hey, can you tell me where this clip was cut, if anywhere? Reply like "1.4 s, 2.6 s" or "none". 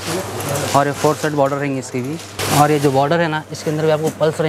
2.4 s